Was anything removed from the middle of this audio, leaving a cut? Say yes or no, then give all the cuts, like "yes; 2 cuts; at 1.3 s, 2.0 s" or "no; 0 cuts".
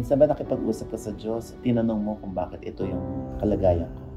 no; 0 cuts